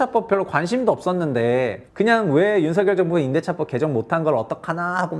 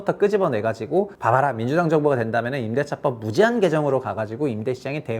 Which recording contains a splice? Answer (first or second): second